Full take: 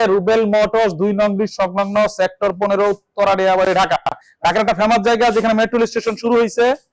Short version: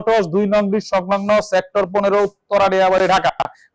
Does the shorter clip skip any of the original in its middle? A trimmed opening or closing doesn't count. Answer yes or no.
no